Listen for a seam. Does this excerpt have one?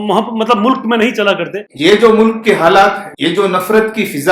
yes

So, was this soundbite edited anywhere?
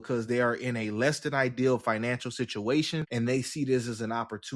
yes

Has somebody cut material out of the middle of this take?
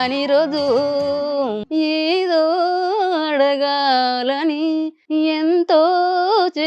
yes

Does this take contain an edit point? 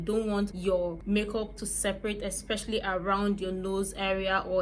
yes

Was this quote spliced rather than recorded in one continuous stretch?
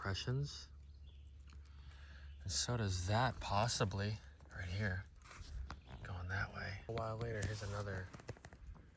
yes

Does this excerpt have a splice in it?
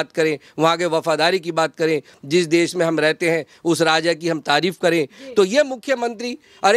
no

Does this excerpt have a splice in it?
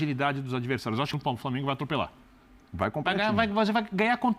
yes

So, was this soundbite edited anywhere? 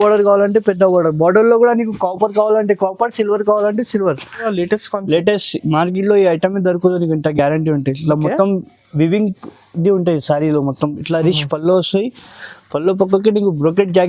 yes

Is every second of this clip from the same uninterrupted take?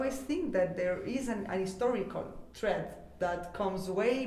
yes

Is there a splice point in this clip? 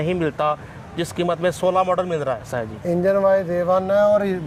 no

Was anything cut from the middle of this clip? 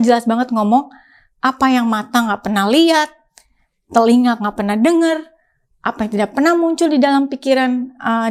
no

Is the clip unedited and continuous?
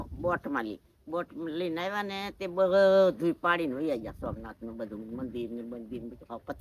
yes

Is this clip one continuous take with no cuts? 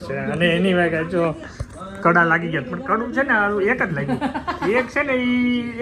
yes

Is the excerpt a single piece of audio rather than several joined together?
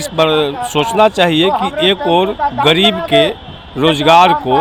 yes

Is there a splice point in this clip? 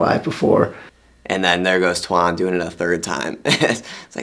yes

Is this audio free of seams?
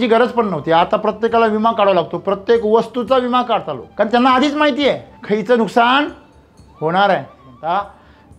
no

